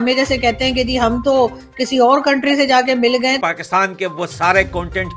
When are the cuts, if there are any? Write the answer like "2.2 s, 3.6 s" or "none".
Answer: 3.4 s